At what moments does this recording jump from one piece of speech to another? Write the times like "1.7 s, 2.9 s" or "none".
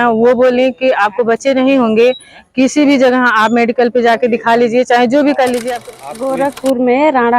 5.7 s